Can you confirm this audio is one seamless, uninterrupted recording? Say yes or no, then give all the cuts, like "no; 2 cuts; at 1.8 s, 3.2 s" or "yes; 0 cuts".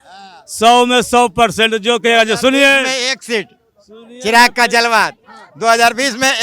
yes; 0 cuts